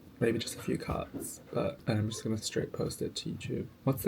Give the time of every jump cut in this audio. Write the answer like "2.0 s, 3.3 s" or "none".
1.8 s

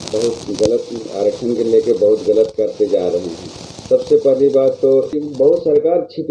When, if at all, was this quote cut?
5.2 s

